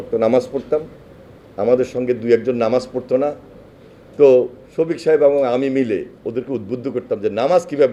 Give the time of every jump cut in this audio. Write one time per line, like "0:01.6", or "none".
none